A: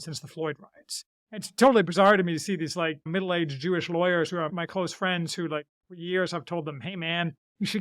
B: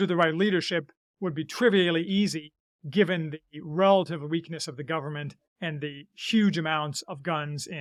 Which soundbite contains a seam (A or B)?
A